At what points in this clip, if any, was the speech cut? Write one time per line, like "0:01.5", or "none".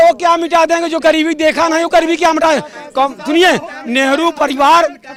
none